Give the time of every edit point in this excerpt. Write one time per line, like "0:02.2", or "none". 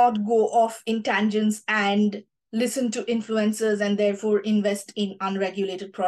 none